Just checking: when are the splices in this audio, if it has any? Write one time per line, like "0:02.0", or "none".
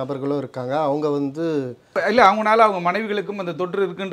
0:02.0